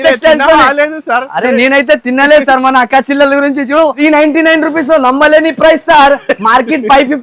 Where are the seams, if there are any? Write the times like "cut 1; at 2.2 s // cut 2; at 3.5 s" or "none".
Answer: cut 1; at 4.0 s